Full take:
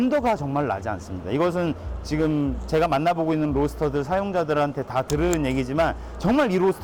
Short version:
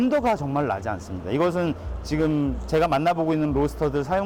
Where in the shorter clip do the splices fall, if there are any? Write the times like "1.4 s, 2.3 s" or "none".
none